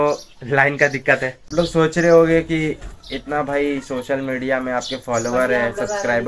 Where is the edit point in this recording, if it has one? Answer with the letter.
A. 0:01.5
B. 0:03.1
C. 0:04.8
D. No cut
A